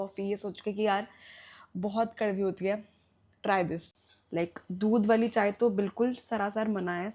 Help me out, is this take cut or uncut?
cut